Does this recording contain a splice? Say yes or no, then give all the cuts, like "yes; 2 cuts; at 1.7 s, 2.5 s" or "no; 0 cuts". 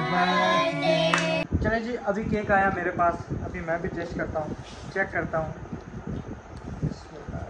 yes; 1 cut; at 1.4 s